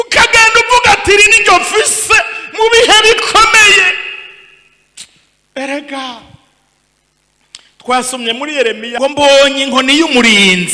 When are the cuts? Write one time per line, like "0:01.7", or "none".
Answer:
0:09.0